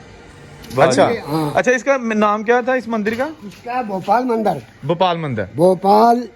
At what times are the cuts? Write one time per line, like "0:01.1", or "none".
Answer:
0:01.5